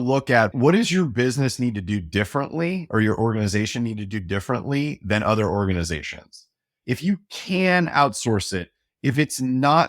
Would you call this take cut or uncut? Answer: cut